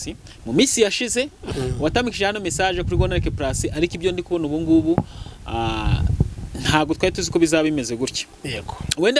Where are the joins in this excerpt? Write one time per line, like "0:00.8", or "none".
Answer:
0:01.5